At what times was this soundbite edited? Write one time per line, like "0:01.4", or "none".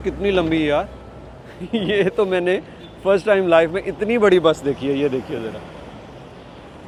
none